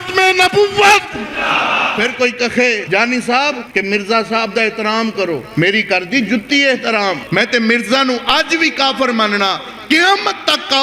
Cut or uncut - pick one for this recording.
cut